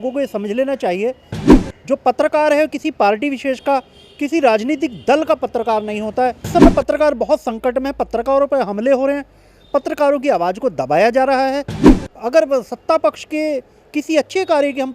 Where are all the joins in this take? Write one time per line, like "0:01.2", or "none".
0:06.5